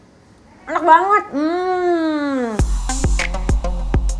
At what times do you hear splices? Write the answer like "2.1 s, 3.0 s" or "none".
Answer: 2.7 s